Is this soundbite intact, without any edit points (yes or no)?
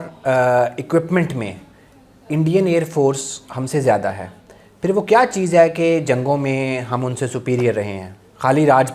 yes